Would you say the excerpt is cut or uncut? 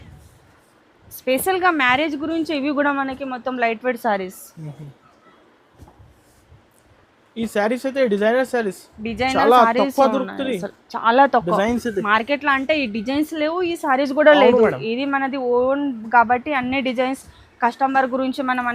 uncut